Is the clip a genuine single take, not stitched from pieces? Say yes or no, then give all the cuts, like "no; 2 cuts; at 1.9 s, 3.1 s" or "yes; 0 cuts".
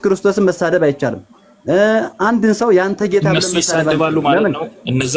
yes; 0 cuts